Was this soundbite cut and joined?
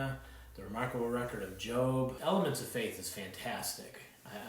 yes; 1 cut; at 2.2 s

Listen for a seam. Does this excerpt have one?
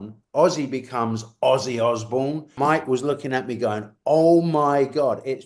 yes; 1 cut; at 2.5 s

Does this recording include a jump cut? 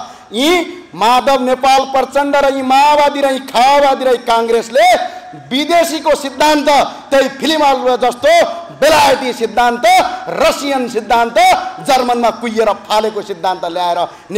no; 0 cuts

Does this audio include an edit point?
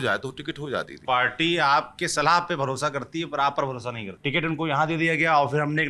yes; 2 cuts; at 1.0 s, 4.1 s

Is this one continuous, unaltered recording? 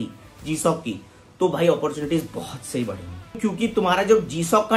no; 1 cut; at 3.4 s

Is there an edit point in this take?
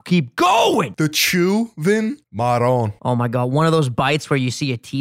yes; 3 cuts; at 0.8 s, 2.3 s, 2.9 s

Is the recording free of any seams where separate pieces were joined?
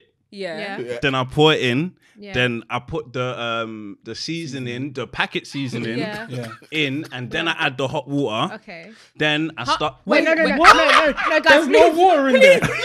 yes; 0 cuts

